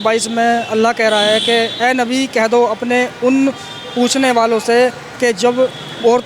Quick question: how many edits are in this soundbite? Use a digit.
0